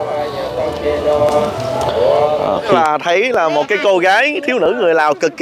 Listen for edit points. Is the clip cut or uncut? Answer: cut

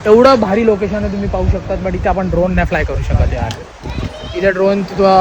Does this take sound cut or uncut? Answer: uncut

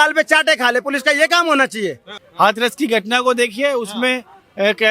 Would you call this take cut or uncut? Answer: cut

